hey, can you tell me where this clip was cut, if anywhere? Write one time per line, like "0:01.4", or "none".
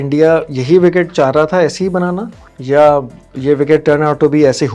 none